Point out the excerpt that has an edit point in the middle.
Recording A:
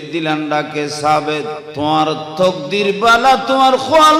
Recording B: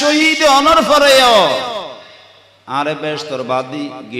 A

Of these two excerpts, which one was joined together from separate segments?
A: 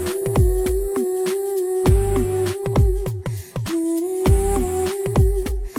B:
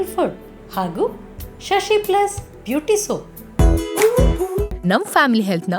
B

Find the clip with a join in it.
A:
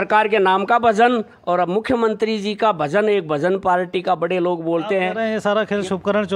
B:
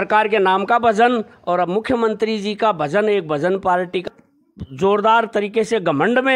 B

